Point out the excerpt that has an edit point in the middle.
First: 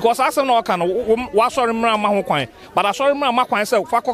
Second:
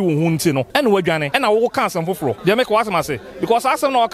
second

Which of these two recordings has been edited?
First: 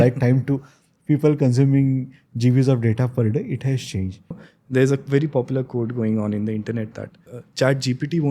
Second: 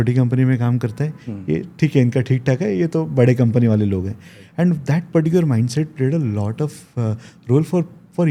first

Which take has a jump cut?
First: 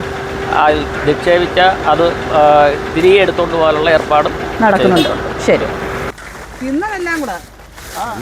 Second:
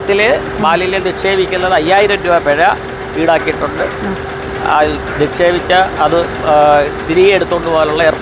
first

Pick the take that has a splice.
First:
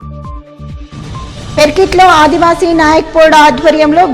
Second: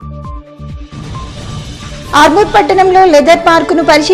first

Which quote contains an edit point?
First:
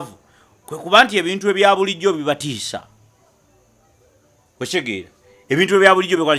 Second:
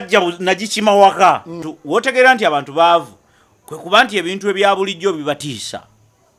second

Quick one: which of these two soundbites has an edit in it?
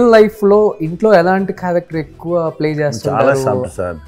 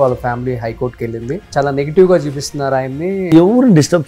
second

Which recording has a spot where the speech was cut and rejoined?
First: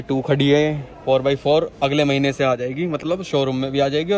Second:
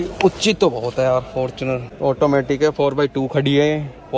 second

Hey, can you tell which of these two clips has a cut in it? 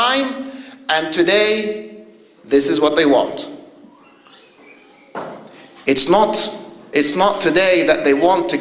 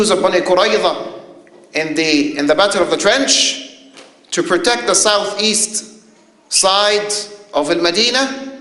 second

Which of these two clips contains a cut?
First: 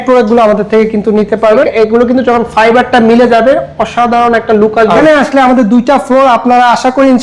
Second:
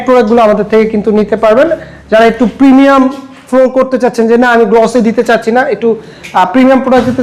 first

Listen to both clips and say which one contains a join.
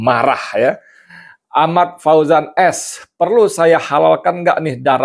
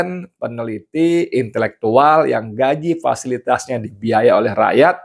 first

